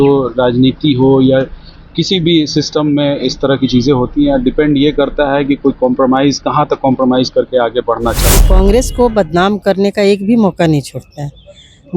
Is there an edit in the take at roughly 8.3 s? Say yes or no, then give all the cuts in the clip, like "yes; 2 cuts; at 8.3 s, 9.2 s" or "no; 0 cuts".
yes; 1 cut; at 8.3 s